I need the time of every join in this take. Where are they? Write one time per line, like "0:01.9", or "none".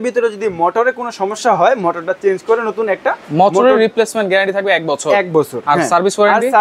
none